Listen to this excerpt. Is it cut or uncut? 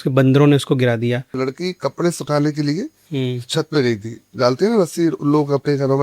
cut